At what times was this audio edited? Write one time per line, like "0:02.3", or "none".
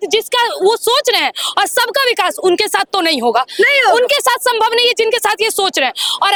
none